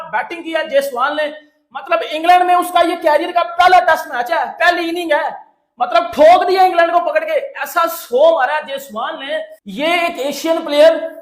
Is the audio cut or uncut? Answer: cut